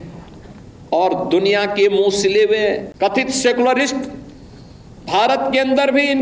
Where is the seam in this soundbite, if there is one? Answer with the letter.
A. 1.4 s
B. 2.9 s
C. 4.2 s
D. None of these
B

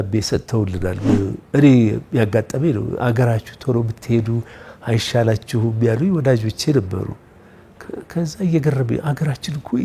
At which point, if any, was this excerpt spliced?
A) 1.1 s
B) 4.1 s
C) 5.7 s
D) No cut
A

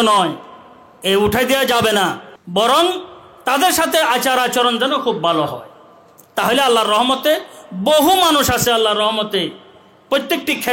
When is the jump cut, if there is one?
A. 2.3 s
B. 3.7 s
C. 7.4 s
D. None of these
A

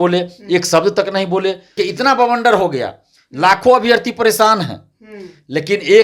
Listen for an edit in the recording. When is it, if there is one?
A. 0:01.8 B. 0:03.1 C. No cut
A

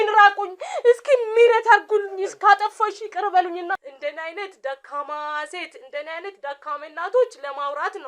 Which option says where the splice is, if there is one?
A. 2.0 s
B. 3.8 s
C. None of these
B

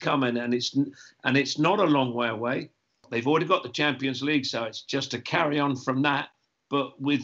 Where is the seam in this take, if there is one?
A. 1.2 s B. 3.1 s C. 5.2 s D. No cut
B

